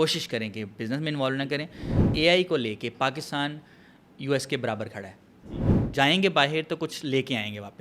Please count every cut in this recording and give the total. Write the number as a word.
two